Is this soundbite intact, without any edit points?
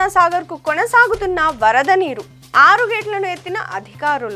yes; 0 cuts

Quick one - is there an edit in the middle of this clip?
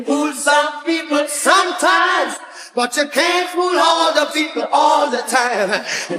no; 0 cuts

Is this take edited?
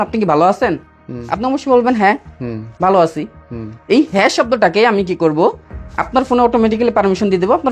no; 0 cuts

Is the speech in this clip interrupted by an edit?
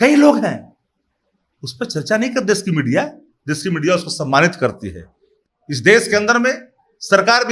no; 0 cuts

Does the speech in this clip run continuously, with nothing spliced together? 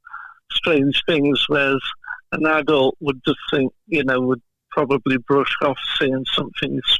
yes; 0 cuts

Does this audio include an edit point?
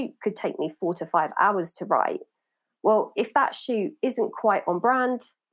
no; 0 cuts

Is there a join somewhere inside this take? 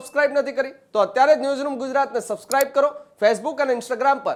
no; 0 cuts

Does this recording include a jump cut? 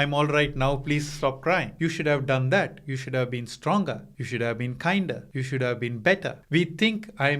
yes; 4 cuts; at 1.7 s, 4.1 s, 5.3 s, 6.3 s

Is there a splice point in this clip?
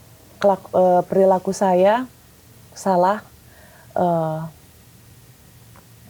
no; 0 cuts

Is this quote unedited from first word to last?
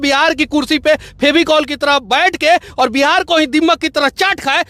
yes; 0 cuts

